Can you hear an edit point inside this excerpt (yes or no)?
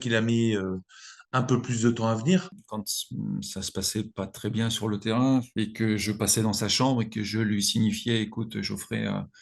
yes